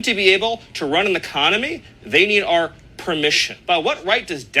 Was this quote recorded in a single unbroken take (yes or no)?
no